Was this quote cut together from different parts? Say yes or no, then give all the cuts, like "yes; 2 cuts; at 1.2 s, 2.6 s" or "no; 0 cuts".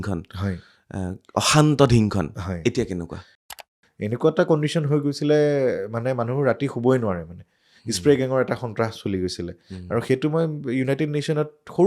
yes; 1 cut; at 3.6 s